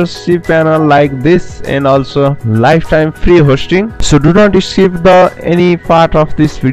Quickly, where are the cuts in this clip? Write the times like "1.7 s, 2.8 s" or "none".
none